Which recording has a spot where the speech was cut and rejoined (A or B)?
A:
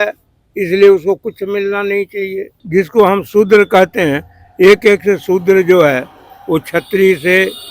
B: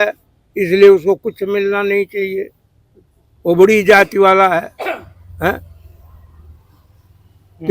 A